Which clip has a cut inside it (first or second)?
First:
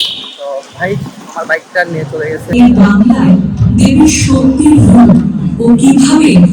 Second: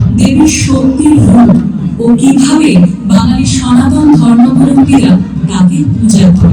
first